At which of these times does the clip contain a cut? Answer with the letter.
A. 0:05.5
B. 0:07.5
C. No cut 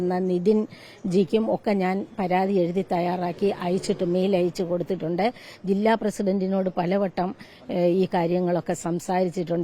C